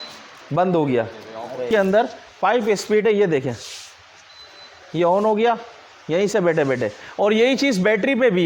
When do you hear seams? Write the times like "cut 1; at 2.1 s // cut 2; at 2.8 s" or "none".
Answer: cut 1; at 1.6 s